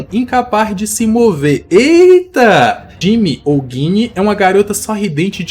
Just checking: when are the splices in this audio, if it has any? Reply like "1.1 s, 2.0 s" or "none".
2.9 s